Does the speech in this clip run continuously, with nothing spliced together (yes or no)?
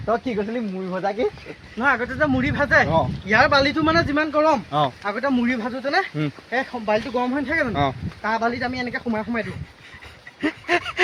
yes